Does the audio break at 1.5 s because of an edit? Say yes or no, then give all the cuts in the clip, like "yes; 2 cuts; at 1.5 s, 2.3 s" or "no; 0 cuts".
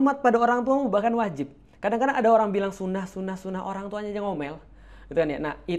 no; 0 cuts